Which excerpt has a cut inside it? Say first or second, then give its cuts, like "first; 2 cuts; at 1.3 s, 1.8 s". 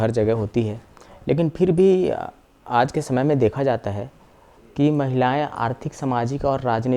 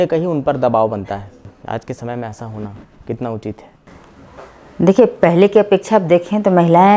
second; 1 cut; at 1.5 s